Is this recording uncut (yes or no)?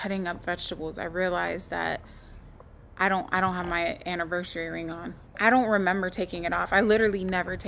yes